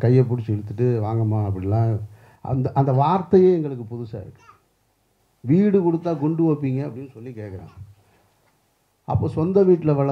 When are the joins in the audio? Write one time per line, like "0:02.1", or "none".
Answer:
none